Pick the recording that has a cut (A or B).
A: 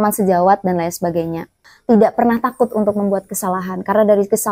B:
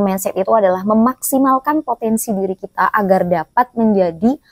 A